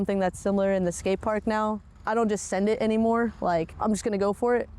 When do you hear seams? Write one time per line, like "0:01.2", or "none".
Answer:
0:01.8
0:03.7